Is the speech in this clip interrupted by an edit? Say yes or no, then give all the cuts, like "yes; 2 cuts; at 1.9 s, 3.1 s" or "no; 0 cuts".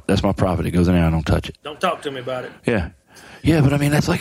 yes; 1 cut; at 1.6 s